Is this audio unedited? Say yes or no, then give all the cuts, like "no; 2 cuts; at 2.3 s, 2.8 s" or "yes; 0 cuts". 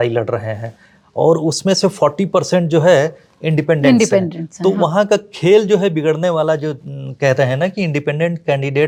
yes; 0 cuts